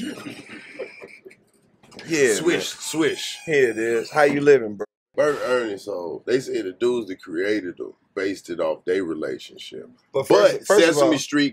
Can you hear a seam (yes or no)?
yes